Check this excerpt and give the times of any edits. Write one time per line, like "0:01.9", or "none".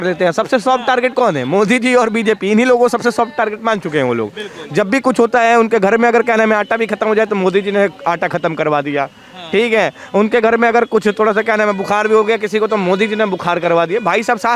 none